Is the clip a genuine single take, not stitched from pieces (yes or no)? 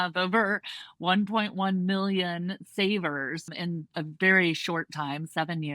no